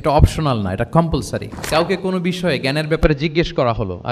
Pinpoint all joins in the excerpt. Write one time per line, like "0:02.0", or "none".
0:01.6